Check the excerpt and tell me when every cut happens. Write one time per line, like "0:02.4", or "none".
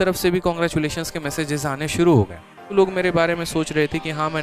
0:02.7